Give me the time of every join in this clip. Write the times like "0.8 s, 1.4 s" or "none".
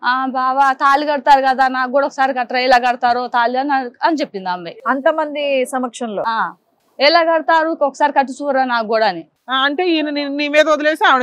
4.7 s, 9.4 s